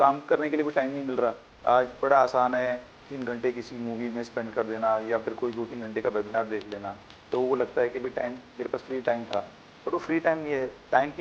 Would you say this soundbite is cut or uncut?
cut